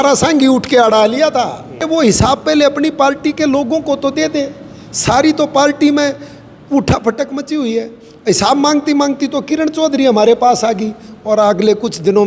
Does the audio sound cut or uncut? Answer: cut